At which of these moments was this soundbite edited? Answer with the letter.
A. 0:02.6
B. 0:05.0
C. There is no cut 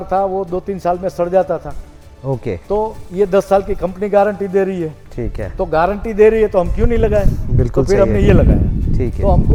C